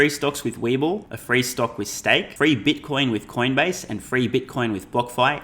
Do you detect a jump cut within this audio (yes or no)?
yes